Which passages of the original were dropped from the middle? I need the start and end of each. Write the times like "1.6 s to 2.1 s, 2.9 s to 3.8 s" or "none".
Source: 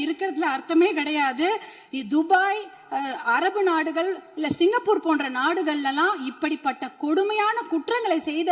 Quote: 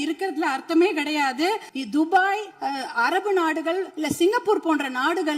1.7 s to 1.9 s, 2.7 s to 2.8 s, 4.2 s to 4.3 s